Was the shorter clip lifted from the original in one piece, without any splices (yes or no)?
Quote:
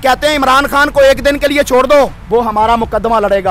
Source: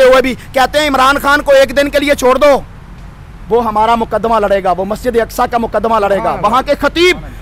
no